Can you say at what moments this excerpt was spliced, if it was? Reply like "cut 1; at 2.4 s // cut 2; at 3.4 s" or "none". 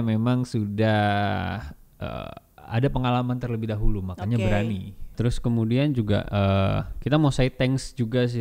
cut 1; at 5.1 s